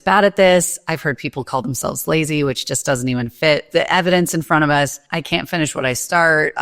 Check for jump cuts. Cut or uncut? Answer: cut